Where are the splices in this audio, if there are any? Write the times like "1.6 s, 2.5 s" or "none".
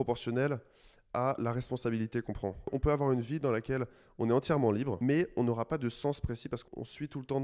2.7 s, 4.9 s, 6.6 s